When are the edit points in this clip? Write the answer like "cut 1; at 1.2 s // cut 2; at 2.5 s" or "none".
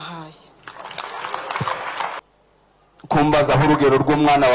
cut 1; at 2.2 s

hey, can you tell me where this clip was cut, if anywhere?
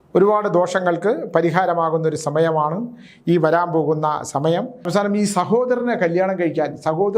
cut 1; at 4.9 s

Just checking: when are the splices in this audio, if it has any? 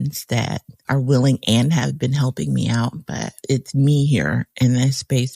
cut 1; at 3.3 s

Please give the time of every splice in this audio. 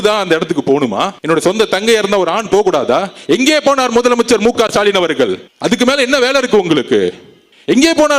none

